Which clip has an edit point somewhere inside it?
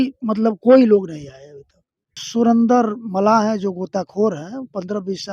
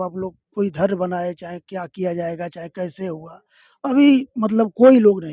first; 1 cut; at 2.2 s

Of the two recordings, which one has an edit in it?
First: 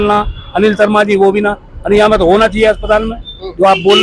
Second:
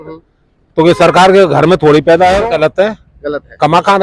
second; 1 cut; at 2.4 s

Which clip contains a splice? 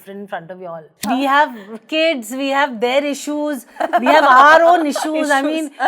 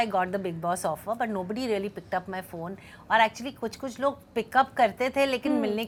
first; 1 cut; at 1.0 s

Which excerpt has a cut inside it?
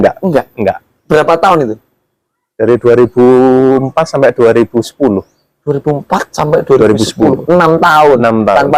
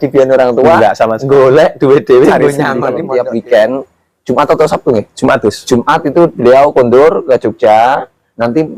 second; 1 cut; at 2.9 s

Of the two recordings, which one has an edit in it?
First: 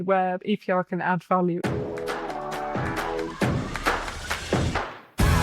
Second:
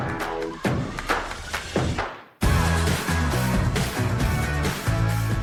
first; 1 cut; at 1.6 s

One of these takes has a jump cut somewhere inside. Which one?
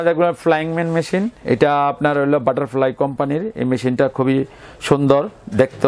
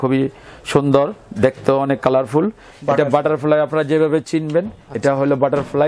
second; 1 cut; at 2.7 s

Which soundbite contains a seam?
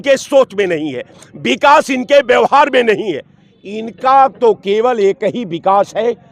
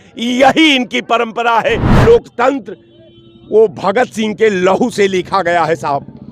second; 1 cut; at 1.9 s

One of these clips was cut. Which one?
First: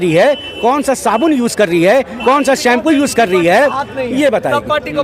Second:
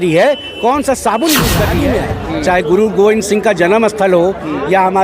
second; 1 cut; at 1.8 s

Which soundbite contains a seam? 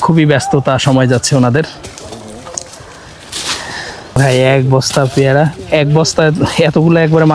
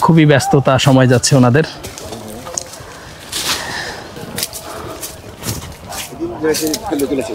first; 1 cut; at 4.1 s

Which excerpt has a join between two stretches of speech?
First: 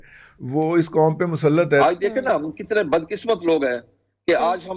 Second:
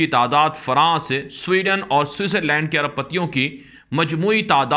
first; 1 cut; at 1.8 s

